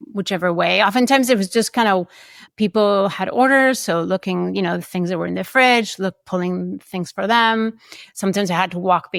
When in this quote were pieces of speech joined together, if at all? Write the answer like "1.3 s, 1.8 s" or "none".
none